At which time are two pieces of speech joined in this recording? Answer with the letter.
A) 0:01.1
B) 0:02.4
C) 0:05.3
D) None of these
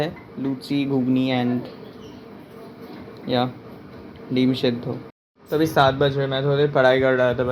C